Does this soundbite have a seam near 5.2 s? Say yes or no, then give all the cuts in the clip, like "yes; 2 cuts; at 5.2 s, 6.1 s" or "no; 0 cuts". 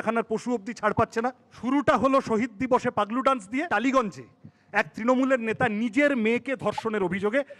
no; 2 cuts; at 1.5 s, 3.7 s